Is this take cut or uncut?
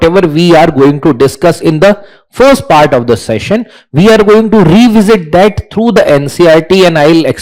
uncut